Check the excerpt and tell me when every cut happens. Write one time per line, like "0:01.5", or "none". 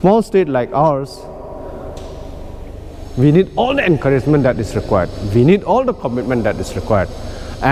none